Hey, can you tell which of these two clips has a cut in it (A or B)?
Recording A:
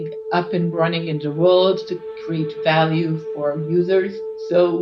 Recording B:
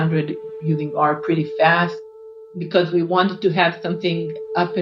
B